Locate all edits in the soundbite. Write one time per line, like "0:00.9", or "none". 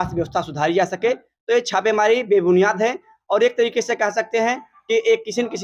none